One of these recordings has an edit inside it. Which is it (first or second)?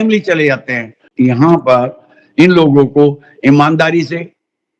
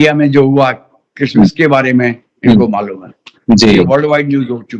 first